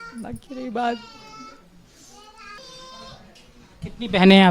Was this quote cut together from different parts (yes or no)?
yes